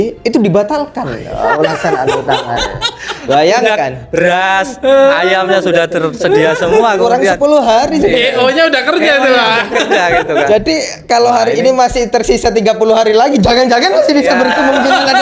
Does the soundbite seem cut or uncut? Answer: uncut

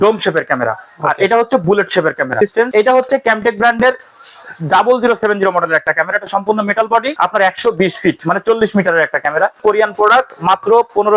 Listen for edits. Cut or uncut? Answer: cut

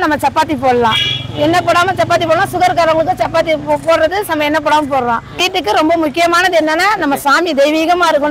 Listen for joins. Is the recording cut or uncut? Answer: cut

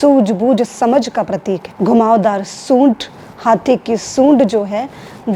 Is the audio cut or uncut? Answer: cut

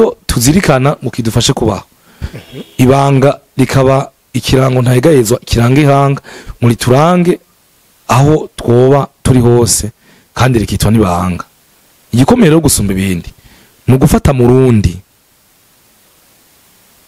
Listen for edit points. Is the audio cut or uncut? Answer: uncut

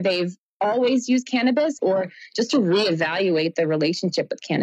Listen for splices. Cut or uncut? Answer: cut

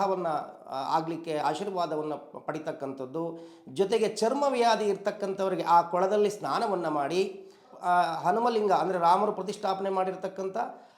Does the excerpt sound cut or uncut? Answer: uncut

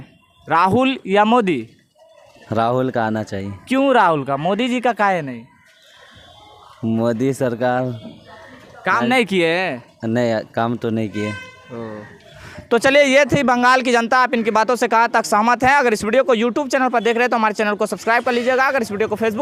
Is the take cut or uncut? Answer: uncut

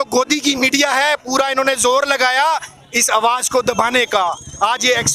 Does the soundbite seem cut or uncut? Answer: uncut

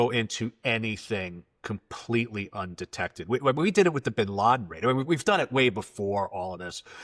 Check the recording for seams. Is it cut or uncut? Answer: uncut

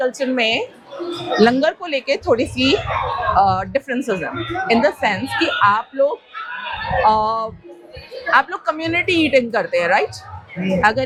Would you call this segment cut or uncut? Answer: uncut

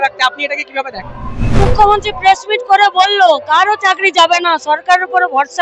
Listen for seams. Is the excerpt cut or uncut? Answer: cut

